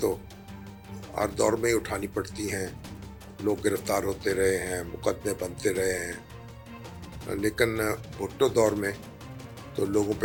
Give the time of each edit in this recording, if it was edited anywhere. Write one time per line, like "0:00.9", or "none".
none